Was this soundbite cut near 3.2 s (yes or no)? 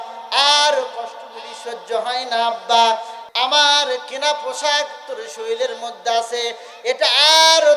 yes